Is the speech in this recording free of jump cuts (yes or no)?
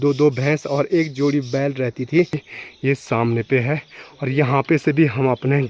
no